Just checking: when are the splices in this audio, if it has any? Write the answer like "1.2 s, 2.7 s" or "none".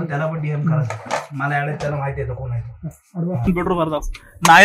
3.5 s